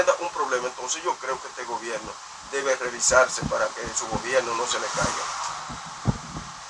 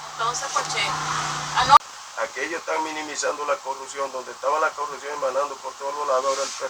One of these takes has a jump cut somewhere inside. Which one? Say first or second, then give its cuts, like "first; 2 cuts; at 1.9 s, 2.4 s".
second; 1 cut; at 2.0 s